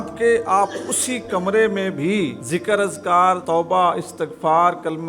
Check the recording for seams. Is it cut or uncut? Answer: cut